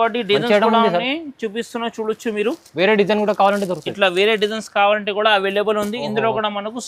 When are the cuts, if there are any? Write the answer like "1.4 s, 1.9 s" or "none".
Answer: none